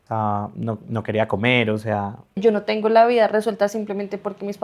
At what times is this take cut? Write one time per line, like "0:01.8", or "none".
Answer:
0:02.4